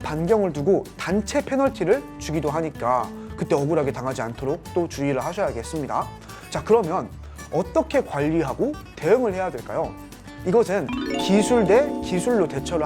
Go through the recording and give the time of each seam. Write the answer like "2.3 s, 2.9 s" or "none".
none